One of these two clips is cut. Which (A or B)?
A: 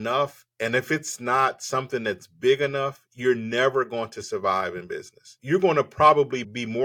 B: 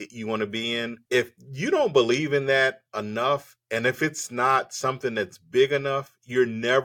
A